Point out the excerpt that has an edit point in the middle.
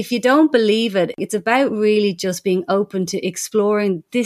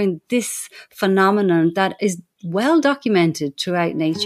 first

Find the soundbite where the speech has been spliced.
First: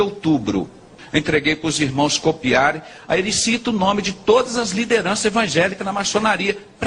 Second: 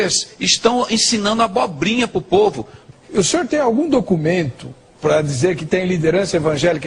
first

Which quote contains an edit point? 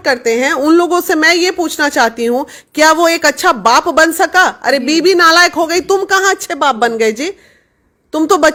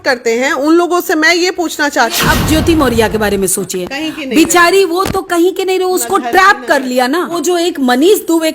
second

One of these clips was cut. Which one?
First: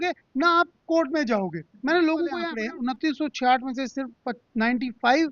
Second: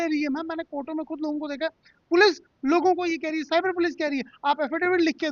first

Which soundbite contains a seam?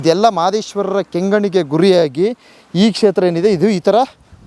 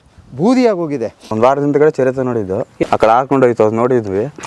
second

